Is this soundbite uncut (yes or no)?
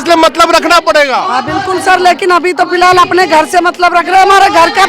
yes